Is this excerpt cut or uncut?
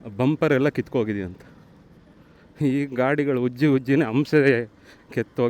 uncut